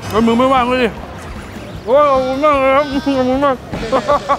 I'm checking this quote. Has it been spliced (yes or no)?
yes